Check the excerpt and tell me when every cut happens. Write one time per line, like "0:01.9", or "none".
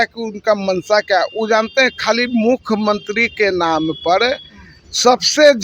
none